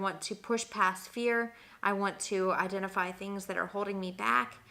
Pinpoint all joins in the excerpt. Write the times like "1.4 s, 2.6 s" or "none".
none